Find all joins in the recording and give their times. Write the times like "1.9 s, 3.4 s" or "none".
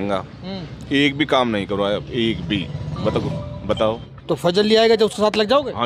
4.1 s

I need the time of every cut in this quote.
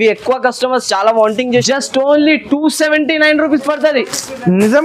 1.6 s

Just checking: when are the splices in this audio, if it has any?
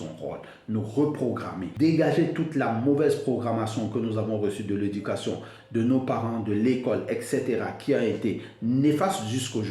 1.6 s

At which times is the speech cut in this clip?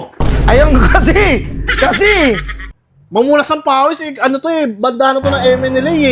2.6 s

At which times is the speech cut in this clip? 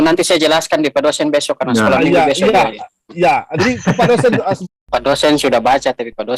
4.7 s

